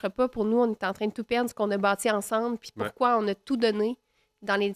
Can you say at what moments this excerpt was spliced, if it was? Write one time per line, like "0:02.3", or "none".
none